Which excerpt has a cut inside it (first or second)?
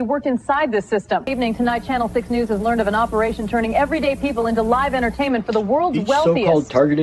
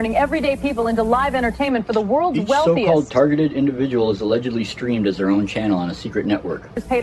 first